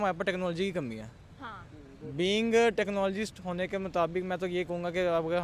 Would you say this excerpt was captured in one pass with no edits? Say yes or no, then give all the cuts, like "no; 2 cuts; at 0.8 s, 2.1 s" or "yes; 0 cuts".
yes; 0 cuts